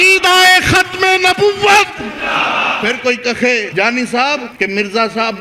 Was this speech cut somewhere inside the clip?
yes; 3 cuts; at 2.7 s, 3.7 s, 4.5 s

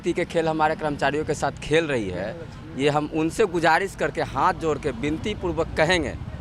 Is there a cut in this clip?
no; 0 cuts

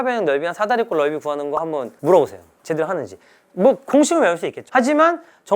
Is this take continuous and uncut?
no; 1 cut; at 4.5 s

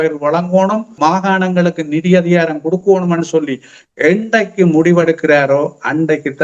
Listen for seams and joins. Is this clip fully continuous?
no; 1 cut; at 0.9 s

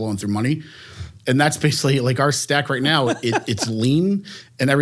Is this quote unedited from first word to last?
yes; 0 cuts

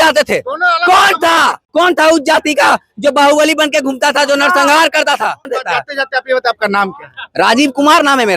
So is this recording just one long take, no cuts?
no; 2 cuts; at 1.6 s, 5.6 s

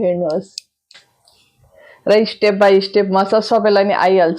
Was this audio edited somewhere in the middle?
yes; 1 cut; at 1.1 s

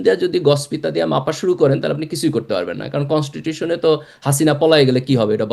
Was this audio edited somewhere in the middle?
no; 0 cuts

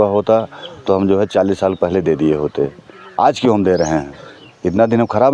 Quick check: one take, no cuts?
yes; 0 cuts

